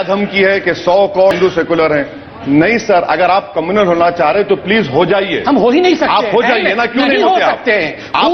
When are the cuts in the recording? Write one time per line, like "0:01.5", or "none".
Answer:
0:01.3